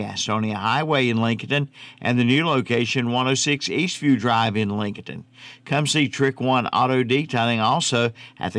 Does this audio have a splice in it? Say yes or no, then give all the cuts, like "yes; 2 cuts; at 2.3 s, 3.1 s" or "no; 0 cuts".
no; 0 cuts